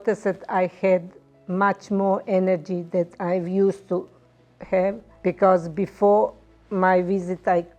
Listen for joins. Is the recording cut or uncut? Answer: cut